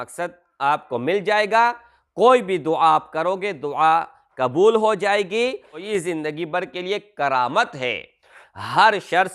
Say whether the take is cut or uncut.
cut